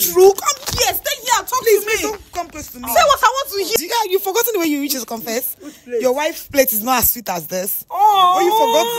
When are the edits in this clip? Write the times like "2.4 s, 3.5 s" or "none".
3.8 s

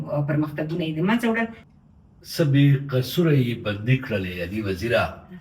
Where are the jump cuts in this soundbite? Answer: 1.6 s

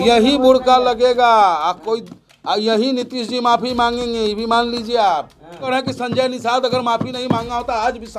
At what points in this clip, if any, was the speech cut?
5.7 s

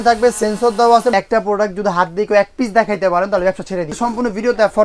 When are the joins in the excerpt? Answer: 1.1 s, 3.9 s

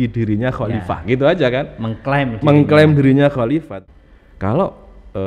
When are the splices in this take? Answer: 3.7 s

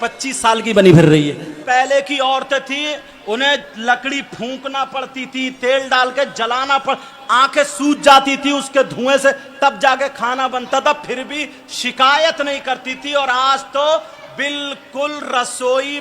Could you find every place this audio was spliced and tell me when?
1.6 s

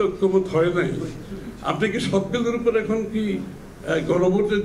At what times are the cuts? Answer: none

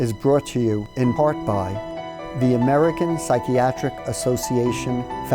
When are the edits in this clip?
1.8 s

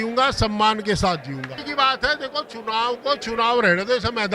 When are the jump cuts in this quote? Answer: 1.7 s

